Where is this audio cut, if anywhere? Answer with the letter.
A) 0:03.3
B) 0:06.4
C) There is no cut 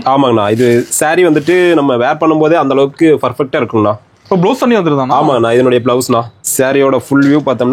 B